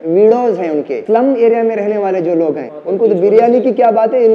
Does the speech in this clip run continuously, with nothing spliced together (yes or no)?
no